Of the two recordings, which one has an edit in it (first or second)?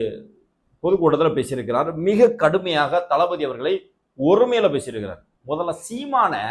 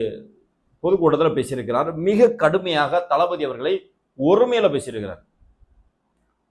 first